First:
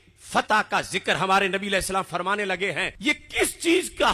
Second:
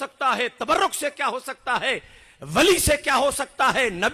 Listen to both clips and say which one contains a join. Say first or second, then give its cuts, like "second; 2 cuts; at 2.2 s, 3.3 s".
first; 1 cut; at 2.9 s